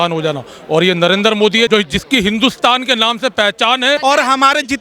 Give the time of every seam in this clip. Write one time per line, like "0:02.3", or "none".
0:01.7
0:04.0